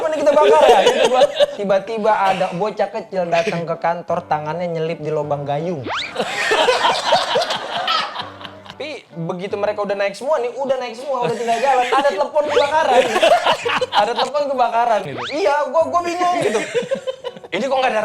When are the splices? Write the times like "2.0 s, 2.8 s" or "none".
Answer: 1.5 s, 8.7 s, 15.1 s